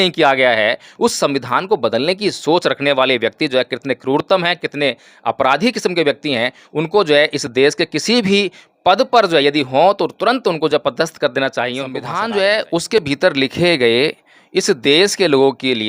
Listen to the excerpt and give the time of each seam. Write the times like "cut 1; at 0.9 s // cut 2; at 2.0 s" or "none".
cut 1; at 12.1 s